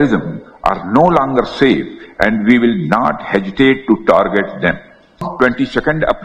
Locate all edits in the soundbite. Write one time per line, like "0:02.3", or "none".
0:05.3